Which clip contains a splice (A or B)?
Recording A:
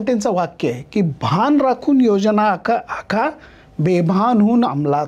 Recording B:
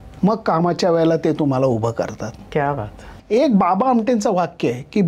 B